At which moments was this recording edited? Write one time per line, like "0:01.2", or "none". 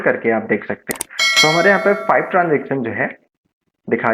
0:01.0

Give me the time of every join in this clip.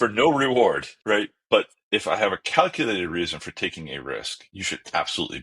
0:00.9

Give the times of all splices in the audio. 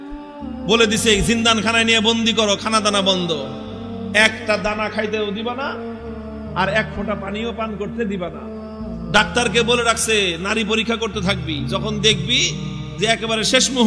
none

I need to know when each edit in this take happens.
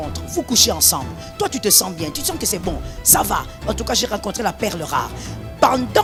none

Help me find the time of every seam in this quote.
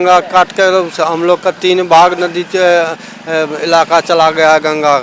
none

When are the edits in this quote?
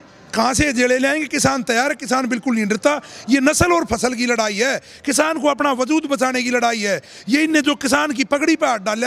none

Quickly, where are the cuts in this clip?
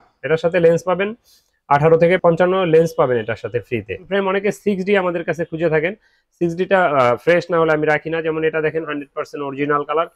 0:02.2
0:04.0

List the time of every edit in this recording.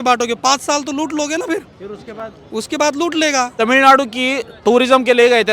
0:03.5

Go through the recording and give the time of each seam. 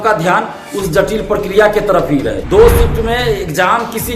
0:02.4

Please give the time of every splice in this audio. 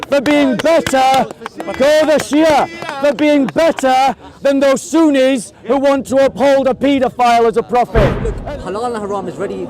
0:08.3

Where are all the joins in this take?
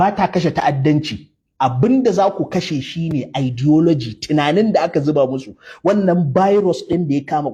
none

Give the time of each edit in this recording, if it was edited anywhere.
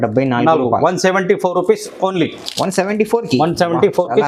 none

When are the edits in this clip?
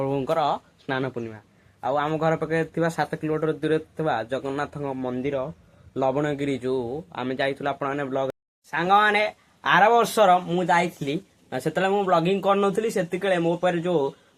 0:08.3

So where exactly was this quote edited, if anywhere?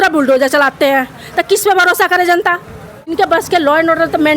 0:03.1

